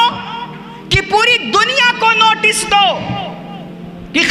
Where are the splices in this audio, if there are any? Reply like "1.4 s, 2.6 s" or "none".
none